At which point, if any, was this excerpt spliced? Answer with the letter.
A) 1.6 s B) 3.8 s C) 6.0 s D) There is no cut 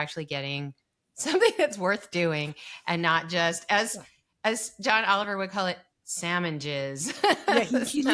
D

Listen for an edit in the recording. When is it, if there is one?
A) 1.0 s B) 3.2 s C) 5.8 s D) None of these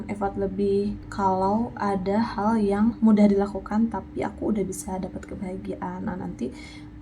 A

